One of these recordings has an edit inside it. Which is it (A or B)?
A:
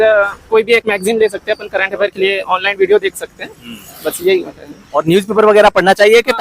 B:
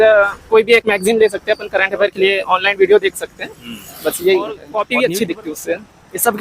B